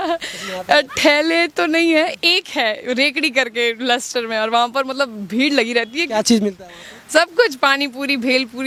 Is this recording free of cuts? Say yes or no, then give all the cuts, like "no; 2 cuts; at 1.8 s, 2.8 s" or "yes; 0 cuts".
yes; 0 cuts